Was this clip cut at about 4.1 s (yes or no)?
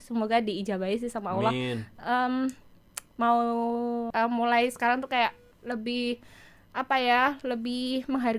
yes